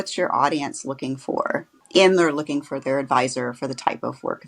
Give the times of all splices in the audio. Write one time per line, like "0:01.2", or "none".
0:01.7